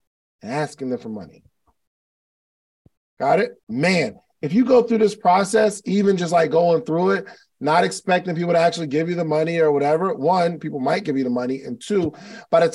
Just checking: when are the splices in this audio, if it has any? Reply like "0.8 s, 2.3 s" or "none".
3.6 s